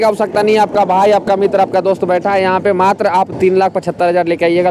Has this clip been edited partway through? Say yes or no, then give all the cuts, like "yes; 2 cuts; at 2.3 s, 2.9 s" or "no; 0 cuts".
no; 0 cuts